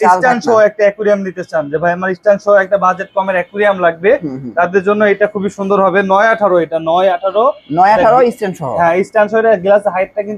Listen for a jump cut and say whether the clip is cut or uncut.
uncut